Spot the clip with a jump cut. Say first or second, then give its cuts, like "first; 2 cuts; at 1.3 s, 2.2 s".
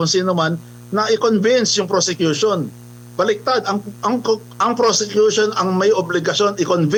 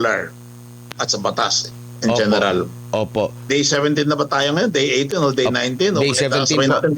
second; 1 cut; at 3.4 s